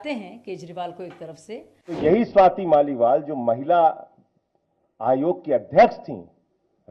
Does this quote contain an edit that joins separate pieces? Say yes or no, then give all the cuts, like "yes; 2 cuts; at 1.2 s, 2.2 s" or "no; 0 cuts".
yes; 1 cut; at 2.0 s